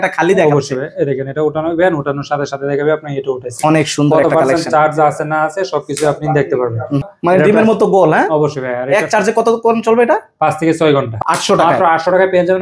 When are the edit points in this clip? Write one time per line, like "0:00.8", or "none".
0:07.1
0:11.1